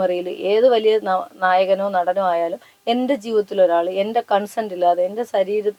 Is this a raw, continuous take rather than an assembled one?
yes; 0 cuts

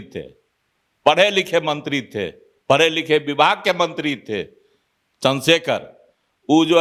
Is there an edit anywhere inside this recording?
no; 0 cuts

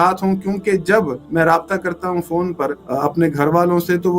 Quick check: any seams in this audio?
yes; 2 cuts; at 1.2 s, 2.8 s

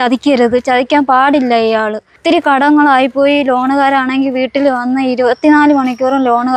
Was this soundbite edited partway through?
yes; 1 cut; at 2.2 s

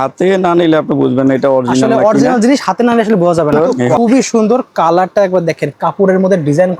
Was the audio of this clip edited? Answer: yes; 1 cut; at 3.7 s

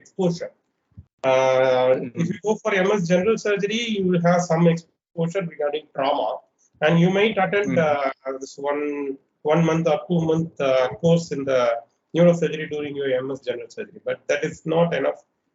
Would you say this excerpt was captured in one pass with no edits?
yes; 0 cuts

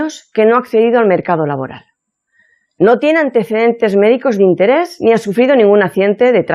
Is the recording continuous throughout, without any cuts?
no; 1 cut; at 3.1 s

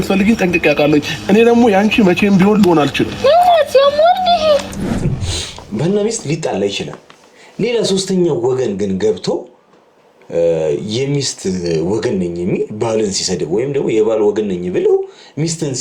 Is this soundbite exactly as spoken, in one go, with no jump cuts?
no; 1 cut; at 5.1 s

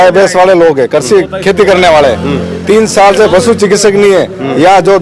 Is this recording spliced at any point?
no; 0 cuts

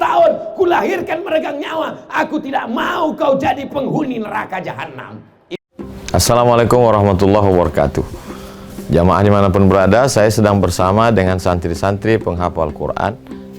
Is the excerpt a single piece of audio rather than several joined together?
no; 1 cut; at 5.4 s

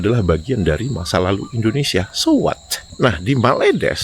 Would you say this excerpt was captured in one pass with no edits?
no; 1 cut; at 2.8 s

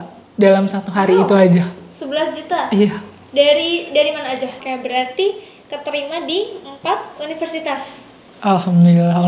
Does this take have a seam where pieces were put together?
yes; 1 cut; at 4.7 s

